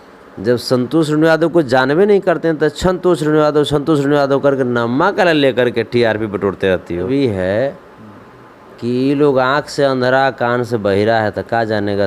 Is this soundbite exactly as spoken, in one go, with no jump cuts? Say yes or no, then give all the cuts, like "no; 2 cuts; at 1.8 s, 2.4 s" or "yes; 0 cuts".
no; 1 cut; at 7.1 s